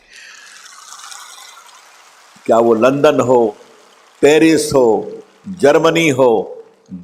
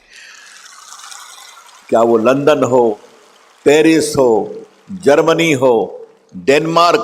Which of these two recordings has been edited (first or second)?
second